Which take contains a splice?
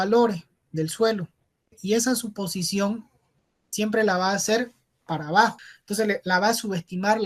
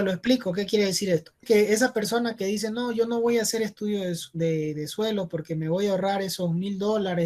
first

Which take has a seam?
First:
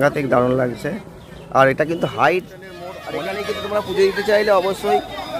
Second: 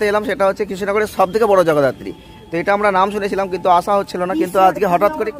first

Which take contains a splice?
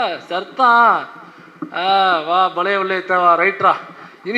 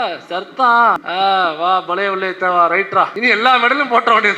second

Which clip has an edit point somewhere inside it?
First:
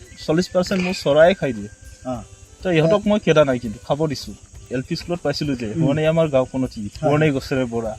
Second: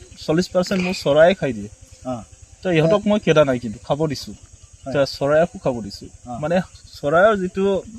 first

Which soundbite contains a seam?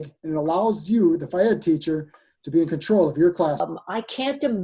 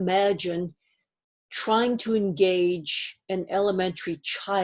first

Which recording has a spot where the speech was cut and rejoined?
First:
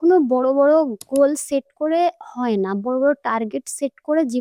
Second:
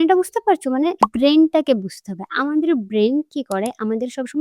second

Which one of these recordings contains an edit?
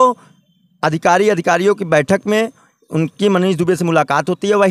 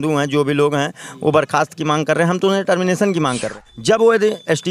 second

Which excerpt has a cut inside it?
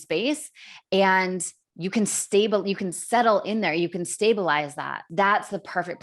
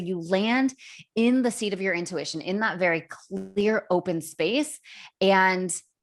first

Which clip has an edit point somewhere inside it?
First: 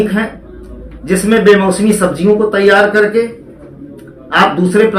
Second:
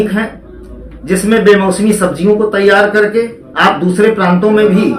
second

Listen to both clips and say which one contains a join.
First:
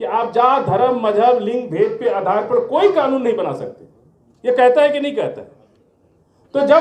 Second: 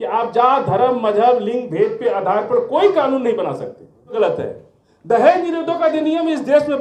second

